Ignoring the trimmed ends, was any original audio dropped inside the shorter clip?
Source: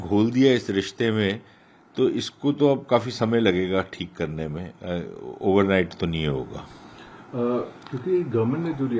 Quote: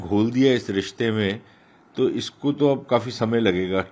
no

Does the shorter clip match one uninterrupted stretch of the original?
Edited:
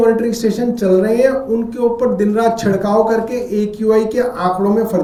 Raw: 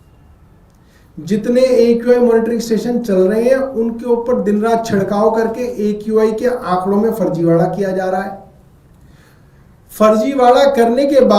yes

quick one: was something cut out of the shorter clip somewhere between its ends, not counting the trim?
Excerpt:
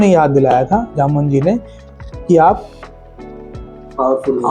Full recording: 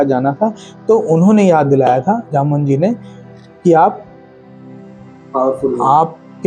no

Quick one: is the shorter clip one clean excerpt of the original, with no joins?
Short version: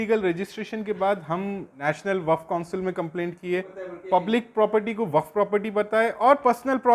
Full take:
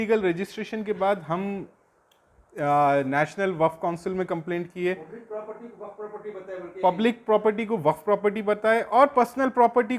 no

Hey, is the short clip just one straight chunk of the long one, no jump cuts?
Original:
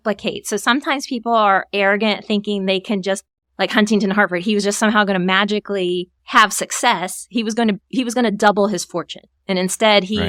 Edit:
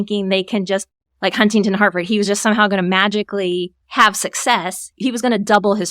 no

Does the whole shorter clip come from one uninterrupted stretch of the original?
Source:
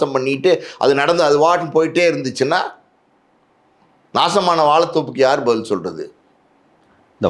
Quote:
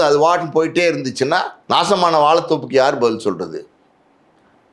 no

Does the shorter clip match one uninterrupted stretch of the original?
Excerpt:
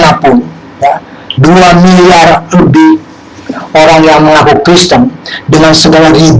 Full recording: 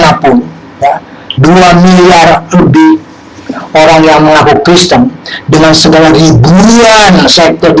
yes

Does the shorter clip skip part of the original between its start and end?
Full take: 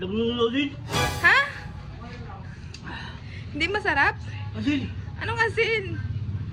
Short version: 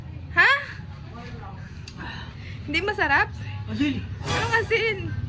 no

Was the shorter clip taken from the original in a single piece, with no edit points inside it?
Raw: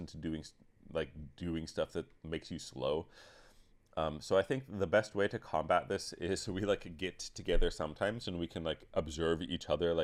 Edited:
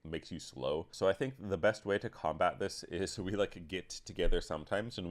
no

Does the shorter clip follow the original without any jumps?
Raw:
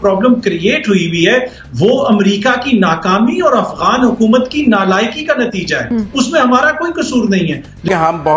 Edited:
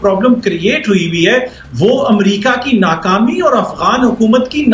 yes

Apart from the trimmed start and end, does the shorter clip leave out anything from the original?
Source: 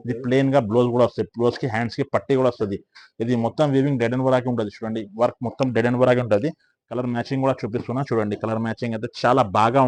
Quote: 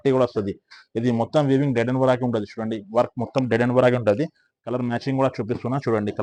no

